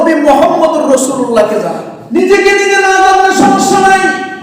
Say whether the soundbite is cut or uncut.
cut